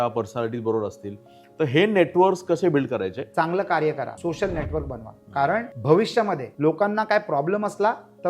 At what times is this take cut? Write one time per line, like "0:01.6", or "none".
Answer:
0:03.2
0:04.1
0:05.7
0:06.5

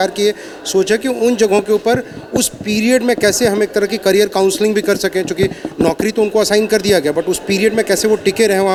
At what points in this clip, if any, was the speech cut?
none

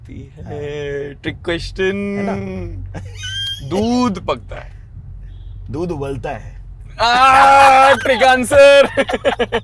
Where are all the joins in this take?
none

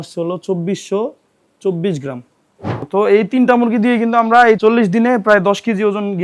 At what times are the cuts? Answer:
0:02.8
0:04.6

